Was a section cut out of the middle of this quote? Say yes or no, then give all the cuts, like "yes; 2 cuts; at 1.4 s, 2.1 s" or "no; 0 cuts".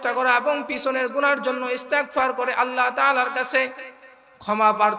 no; 0 cuts